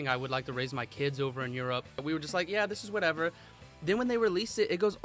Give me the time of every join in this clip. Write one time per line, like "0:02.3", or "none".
0:02.0